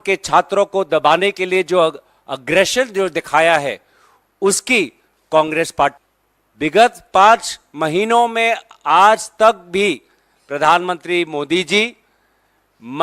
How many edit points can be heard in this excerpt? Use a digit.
1